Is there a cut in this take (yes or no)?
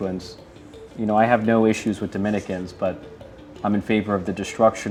no